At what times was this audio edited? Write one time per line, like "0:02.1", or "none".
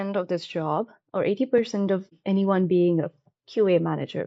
0:02.1